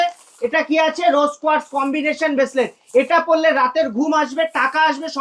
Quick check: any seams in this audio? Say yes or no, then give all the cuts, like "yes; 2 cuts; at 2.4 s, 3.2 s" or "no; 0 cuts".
no; 0 cuts